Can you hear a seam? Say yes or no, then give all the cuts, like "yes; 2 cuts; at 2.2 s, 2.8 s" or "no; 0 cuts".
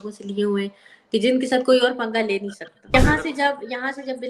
yes; 1 cut; at 2.9 s